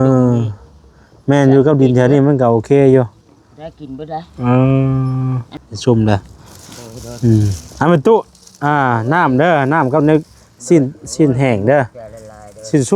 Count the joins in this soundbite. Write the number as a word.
one